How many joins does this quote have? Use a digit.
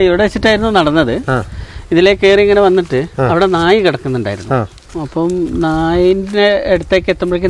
0